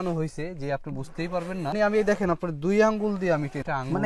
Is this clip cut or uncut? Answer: uncut